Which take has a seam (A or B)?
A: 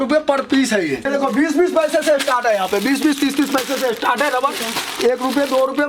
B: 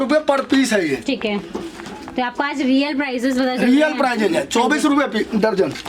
A